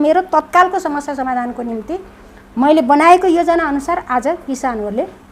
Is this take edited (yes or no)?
no